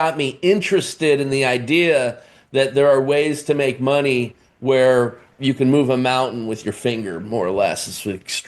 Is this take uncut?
no; 1 cut; at 5.2 s

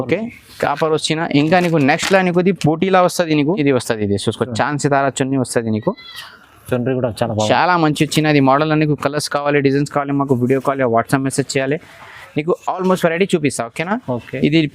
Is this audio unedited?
no; 1 cut; at 3.6 s

